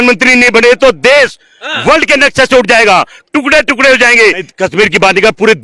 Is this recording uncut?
no; 1 cut; at 4.5 s

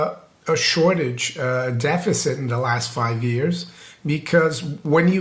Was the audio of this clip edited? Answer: no; 0 cuts

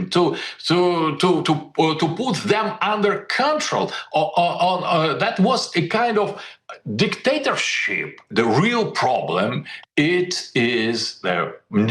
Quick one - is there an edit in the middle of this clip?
yes; 1 cut; at 8.3 s

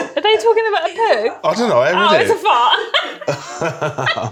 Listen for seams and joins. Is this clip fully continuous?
yes; 0 cuts

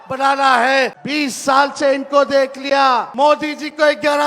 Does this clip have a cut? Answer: yes; 2 cuts; at 1.0 s, 3.1 s

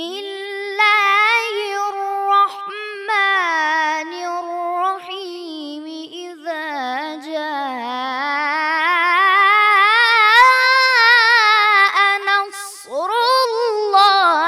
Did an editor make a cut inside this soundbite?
no; 0 cuts

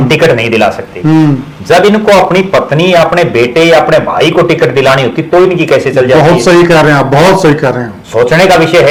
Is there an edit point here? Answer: no; 0 cuts

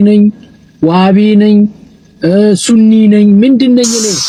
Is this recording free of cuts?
yes; 0 cuts

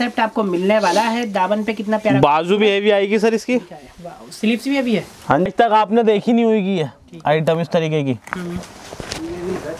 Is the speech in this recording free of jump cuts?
no; 1 cut; at 5.5 s

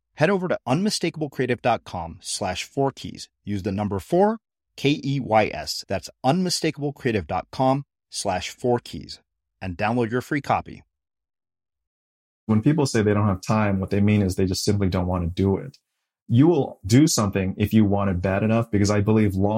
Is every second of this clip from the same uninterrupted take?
no; 1 cut; at 12.5 s

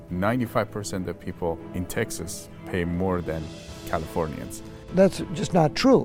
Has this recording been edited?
yes; 2 cuts; at 1.6 s, 4.9 s

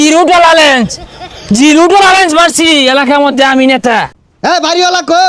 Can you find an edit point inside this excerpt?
yes; 1 cut; at 4.2 s

